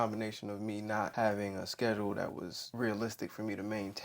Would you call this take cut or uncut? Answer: cut